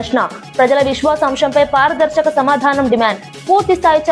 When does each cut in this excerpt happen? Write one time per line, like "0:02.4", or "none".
none

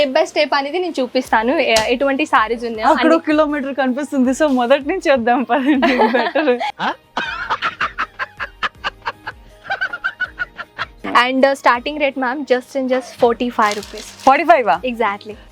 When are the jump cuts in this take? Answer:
0:10.9

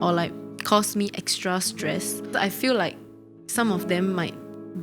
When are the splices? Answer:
0:02.3

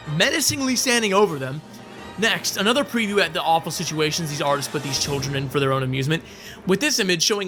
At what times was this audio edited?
none

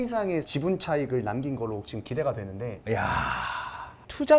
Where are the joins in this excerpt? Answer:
0:02.8

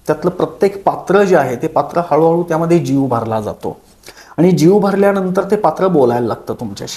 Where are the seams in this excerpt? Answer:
none

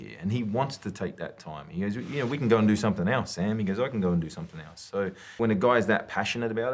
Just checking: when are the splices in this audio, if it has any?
0:05.2

